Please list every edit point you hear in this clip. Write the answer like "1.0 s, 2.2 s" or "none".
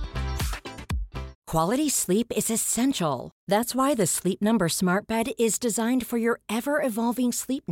1.3 s